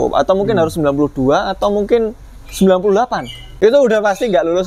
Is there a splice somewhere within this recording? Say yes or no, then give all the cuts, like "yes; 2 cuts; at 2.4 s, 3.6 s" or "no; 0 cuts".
yes; 1 cut; at 3.4 s